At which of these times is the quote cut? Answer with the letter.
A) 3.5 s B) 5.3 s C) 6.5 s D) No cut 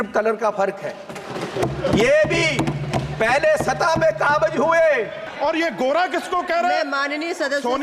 B